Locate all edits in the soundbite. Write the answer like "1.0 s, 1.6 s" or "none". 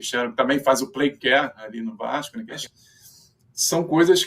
2.6 s